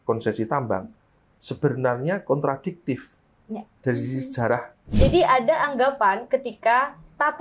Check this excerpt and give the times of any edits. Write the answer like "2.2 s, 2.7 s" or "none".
4.8 s